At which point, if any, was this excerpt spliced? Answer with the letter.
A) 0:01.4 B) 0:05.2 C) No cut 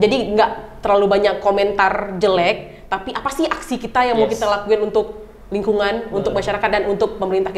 C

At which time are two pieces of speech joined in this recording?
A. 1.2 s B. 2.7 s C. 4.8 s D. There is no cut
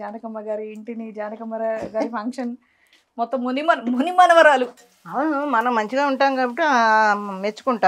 C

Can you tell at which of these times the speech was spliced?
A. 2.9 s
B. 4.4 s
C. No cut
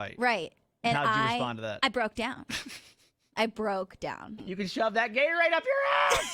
B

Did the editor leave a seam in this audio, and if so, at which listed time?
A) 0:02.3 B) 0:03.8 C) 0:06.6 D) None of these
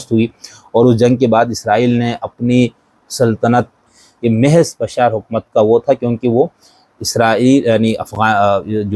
B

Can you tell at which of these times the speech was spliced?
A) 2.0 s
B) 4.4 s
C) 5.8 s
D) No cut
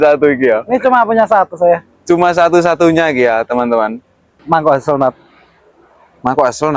B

